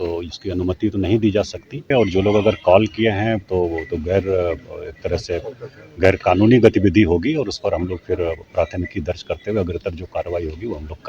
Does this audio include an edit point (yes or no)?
yes